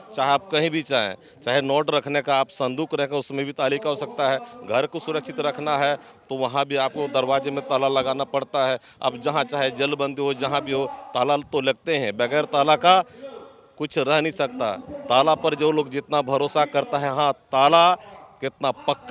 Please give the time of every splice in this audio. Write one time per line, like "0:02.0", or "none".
none